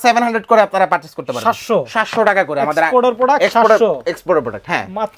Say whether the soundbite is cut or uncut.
uncut